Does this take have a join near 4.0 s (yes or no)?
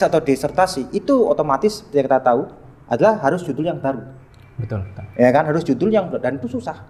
no